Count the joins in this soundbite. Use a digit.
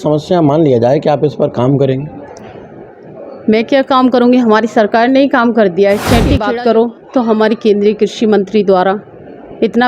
1